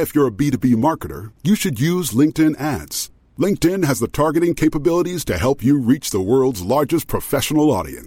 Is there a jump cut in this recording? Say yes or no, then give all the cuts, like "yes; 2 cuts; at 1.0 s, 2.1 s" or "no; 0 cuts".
no; 0 cuts